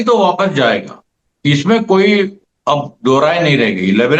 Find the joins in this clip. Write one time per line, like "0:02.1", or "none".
none

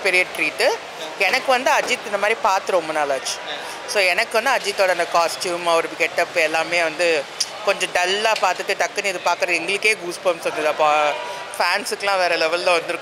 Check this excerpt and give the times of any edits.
none

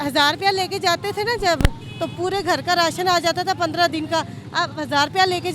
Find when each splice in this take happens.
none

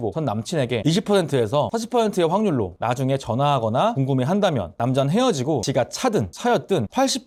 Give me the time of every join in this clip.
none

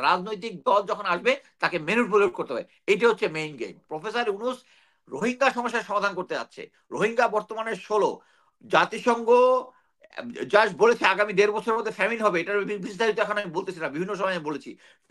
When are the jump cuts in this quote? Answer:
0:03.8

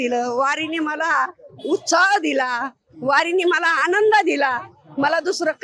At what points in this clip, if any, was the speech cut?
none

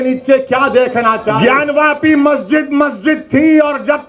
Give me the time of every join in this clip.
0:01.4

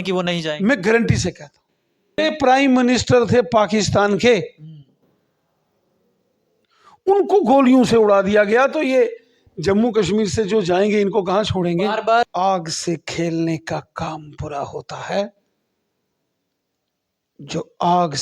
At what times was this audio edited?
0:02.2
0:12.3

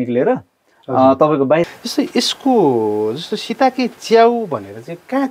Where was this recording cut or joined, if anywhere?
0:01.7

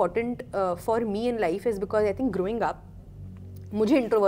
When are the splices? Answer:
none

